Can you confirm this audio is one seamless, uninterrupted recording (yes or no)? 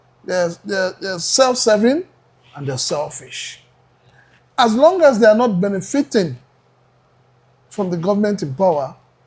yes